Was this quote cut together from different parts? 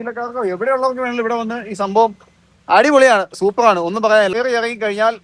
yes; 1 cut; at 4.3 s

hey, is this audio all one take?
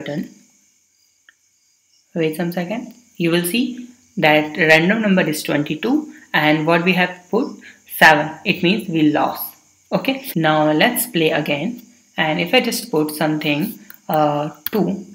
no; 1 cut; at 10.2 s

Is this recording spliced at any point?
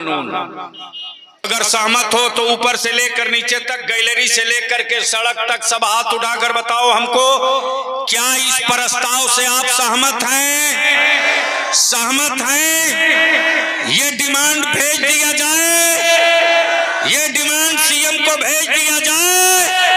yes; 1 cut; at 1.5 s

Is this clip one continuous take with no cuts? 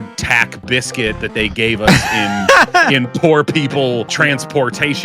no; 1 cut; at 4.1 s

